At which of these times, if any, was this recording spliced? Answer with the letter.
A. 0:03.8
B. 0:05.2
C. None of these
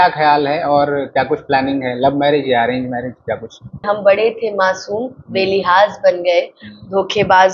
A